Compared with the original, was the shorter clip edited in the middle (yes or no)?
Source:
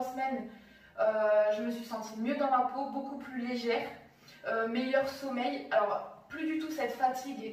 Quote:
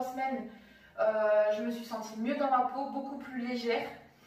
no